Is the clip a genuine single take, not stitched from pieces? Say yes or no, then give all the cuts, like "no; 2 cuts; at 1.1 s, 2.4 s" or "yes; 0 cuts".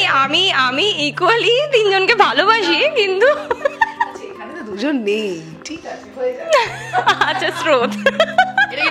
yes; 0 cuts